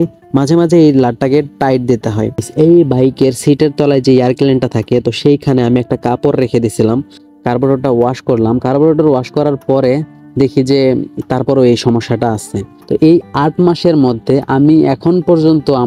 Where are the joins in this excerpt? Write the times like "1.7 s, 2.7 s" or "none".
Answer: 2.5 s, 7.2 s, 12.7 s

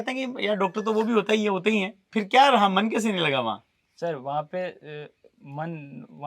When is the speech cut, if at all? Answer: none

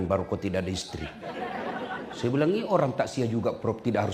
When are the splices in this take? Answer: none

